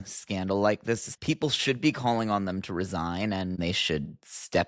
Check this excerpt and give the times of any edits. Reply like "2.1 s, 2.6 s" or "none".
1.1 s, 3.5 s